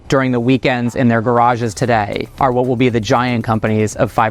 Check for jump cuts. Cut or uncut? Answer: uncut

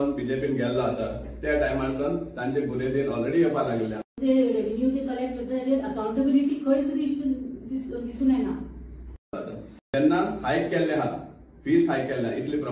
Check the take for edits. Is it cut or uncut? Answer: cut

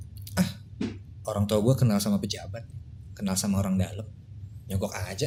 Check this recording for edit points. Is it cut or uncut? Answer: uncut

